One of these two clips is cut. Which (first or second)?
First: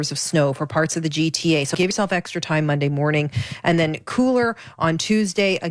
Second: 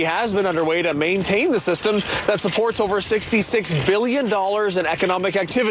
first